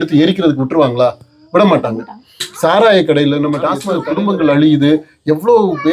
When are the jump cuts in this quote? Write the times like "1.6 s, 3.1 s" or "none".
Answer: 3.9 s